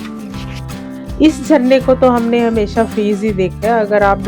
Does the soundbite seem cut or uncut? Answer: cut